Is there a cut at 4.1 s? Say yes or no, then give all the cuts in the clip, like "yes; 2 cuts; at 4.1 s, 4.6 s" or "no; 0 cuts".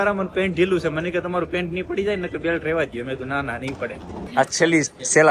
yes; 1 cut; at 4.1 s